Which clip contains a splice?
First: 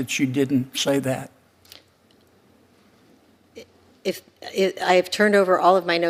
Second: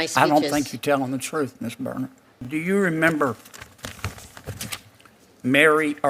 second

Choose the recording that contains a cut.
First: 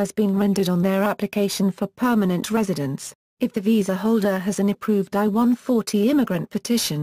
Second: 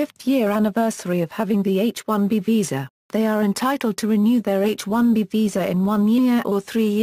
second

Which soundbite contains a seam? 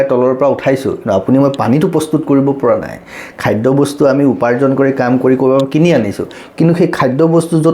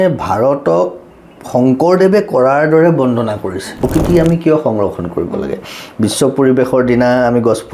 second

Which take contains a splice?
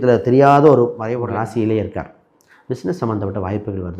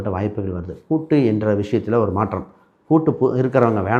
first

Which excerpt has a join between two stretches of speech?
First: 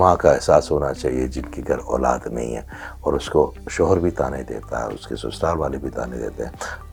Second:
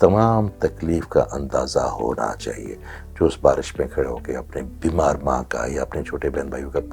second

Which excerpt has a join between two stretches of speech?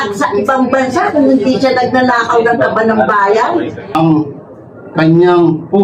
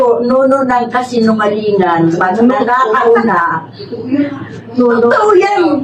first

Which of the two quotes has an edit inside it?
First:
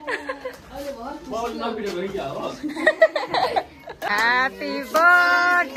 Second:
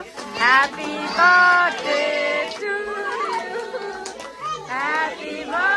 first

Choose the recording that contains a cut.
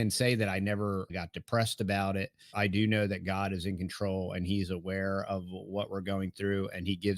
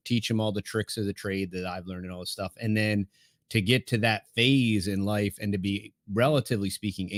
first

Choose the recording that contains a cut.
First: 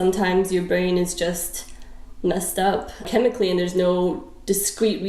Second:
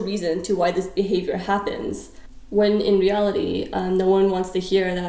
first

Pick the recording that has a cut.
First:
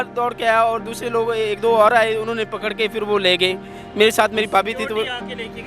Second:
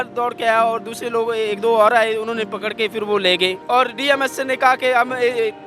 second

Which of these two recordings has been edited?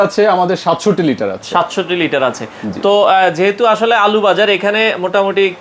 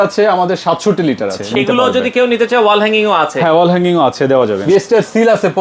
second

